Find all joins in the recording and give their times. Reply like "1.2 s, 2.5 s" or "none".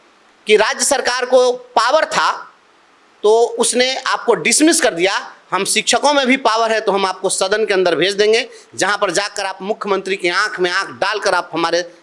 none